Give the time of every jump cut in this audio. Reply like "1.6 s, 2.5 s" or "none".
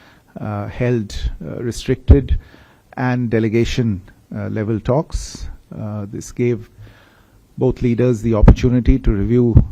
none